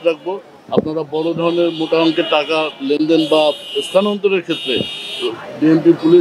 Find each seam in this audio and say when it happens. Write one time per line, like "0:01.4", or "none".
none